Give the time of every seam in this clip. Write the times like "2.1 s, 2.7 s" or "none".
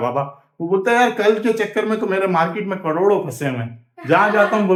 none